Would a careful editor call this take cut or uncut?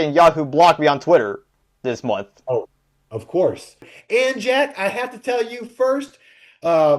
cut